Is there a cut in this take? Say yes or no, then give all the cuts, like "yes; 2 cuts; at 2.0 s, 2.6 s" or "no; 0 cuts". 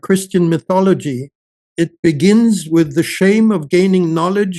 yes; 1 cut; at 1.6 s